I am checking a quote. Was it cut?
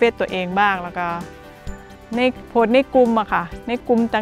no; 0 cuts

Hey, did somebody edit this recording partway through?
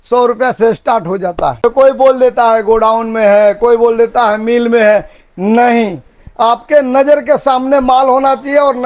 yes; 1 cut; at 1.6 s

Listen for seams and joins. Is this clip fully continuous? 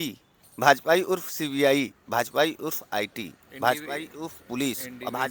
yes; 0 cuts

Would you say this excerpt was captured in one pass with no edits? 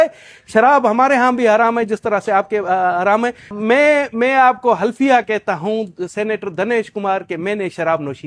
no; 1 cut; at 3.6 s

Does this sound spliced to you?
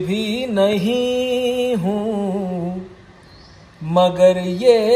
no; 0 cuts

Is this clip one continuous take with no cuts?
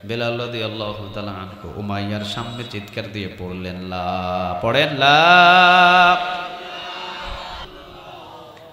no; 1 cut; at 7.7 s

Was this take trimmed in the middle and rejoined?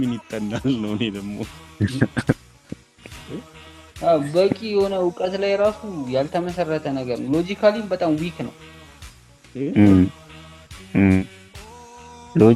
no; 0 cuts

